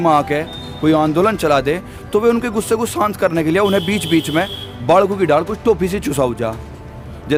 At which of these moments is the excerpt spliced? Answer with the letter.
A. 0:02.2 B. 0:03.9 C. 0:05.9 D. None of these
D